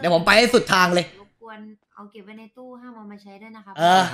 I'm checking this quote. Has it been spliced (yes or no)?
no